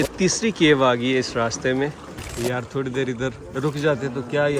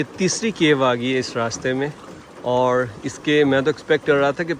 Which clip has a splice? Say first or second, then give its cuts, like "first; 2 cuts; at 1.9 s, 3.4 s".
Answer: first; 2 cuts; at 2.2 s, 3.4 s